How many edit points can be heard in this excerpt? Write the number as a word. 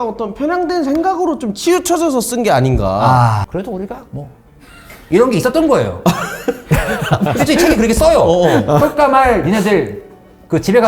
two